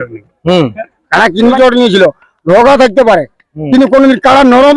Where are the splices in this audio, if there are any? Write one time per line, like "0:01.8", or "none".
0:01.5